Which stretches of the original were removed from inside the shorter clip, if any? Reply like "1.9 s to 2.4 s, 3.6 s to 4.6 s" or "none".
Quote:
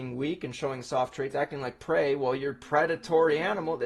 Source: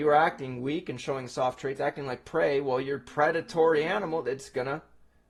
none